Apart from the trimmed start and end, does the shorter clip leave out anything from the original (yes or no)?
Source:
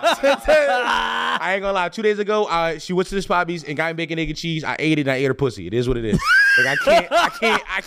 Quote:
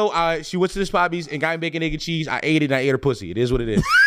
no